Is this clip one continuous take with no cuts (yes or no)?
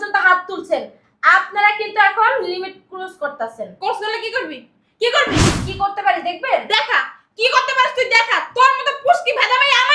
no